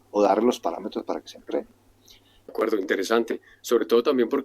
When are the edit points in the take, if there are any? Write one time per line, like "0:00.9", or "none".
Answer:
0:02.5